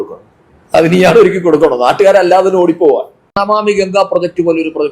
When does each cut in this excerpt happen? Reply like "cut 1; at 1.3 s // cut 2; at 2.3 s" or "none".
cut 1; at 3.2 s